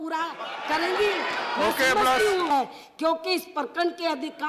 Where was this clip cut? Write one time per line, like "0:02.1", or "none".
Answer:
0:02.5